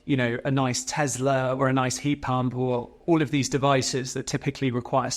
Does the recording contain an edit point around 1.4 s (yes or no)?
no